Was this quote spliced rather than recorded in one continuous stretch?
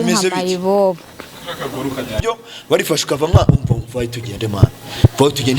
yes; 1 cut; at 2.1 s

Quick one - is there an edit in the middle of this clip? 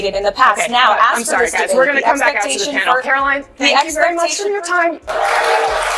yes; 1 cut; at 5.1 s

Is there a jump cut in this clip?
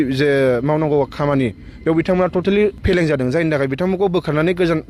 yes; 1 cut; at 2.8 s

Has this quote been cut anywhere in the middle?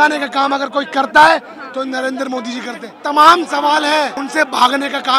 yes; 2 cuts; at 2.9 s, 4.2 s

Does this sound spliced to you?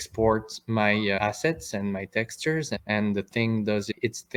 no; 0 cuts

